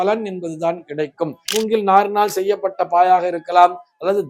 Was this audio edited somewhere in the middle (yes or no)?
yes